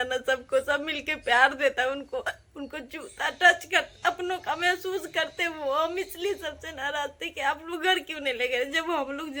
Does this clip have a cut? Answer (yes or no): no